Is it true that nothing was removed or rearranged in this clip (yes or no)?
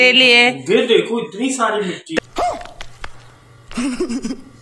no